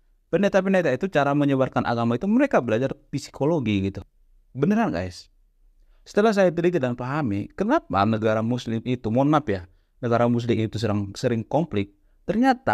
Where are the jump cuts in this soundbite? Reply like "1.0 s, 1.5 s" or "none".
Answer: 4.0 s